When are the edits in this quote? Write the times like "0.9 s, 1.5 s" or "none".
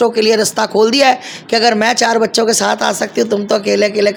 none